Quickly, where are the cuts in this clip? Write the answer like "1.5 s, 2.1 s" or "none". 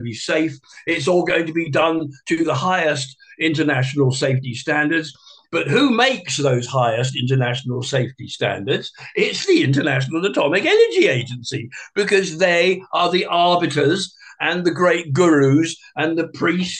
none